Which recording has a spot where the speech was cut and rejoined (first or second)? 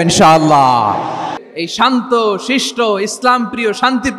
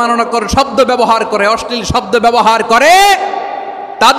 first